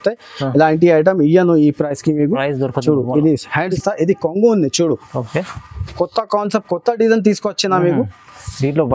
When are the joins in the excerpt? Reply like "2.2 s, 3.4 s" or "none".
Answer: 3.7 s